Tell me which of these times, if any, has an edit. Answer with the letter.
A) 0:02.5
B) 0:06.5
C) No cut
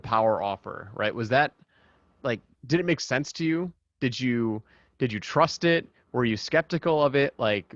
A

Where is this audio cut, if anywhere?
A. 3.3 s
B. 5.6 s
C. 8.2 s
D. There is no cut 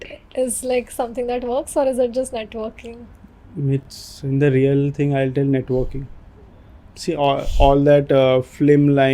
D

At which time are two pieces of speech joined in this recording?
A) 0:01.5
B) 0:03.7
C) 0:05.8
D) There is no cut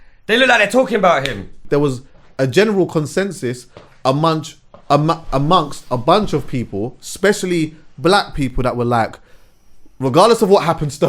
A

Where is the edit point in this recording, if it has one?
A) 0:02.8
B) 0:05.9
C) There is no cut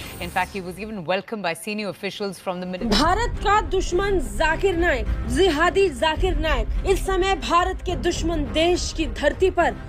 A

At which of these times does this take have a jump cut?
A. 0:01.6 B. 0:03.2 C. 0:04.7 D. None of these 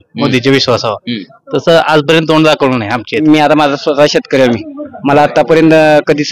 B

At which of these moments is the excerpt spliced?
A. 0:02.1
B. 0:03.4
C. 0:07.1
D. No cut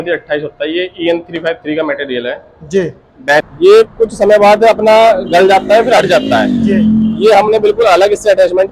B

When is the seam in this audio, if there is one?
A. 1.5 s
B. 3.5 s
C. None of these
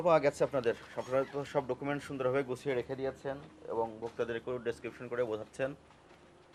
C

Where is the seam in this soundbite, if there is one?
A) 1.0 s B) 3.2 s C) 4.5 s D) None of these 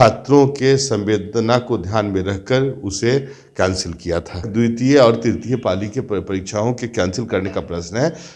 C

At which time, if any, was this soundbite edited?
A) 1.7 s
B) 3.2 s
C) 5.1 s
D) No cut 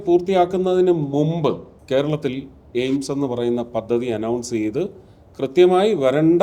A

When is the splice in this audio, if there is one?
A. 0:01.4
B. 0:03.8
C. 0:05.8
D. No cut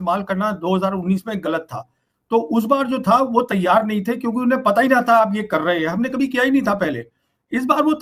D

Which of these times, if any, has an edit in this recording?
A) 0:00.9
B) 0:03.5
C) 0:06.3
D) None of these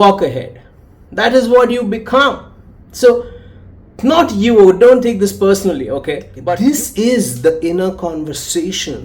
C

